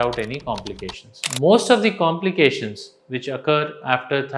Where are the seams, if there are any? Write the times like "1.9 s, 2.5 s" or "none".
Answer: 1.2 s